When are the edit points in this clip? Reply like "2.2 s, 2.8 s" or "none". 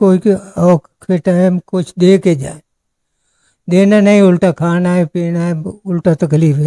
none